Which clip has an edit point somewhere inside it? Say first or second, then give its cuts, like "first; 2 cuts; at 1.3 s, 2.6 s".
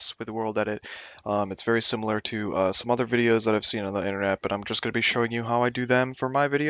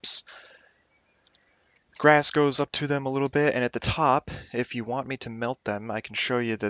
second; 1 cut; at 3.9 s